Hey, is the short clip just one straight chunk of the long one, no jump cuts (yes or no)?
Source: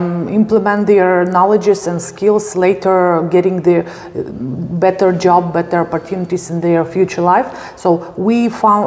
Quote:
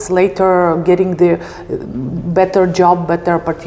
yes